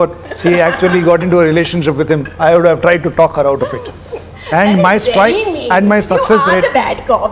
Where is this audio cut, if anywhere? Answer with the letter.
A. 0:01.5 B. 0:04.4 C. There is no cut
C